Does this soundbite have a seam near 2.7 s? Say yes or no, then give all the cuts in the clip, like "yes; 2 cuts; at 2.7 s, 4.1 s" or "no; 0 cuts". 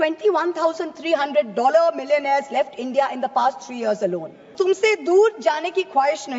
no; 1 cut; at 4.5 s